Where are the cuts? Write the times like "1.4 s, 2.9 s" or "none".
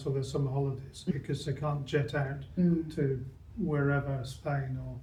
none